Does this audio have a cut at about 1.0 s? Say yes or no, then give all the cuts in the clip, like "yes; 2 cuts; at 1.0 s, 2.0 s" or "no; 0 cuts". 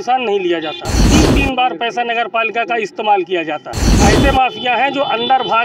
yes; 2 cuts; at 1.0 s, 4.0 s